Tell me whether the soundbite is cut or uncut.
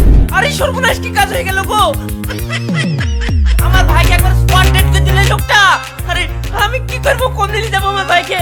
uncut